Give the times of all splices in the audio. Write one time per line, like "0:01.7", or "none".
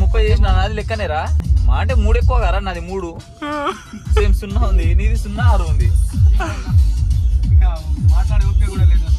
none